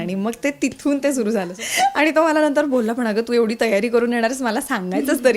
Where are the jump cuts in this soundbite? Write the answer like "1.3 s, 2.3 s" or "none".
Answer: 1.5 s